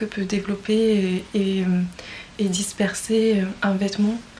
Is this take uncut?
yes; 0 cuts

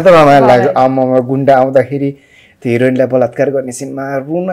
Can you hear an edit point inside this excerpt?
no; 0 cuts

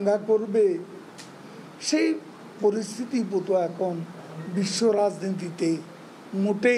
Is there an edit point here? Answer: no; 0 cuts

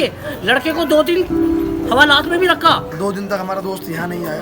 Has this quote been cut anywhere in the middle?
yes; 1 cut; at 2.9 s

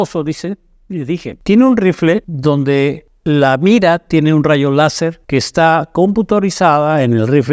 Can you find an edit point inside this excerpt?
yes; 4 cuts; at 1.3 s, 2.3 s, 3.1 s, 5.2 s

